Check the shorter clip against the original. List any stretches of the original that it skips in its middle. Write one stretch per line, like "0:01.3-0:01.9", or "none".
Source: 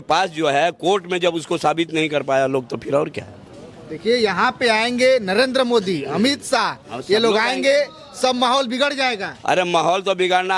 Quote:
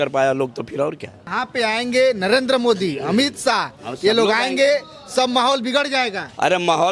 0:03.5-0:04.4